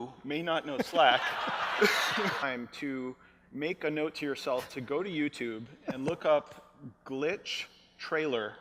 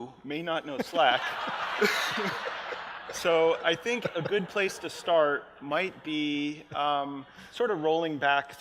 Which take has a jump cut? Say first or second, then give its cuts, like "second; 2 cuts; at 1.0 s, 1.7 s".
second; 1 cut; at 2.4 s